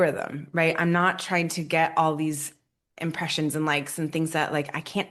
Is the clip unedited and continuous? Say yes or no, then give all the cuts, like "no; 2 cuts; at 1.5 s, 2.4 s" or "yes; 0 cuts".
yes; 0 cuts